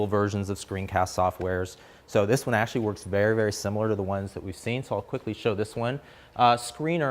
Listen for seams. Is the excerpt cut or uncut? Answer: cut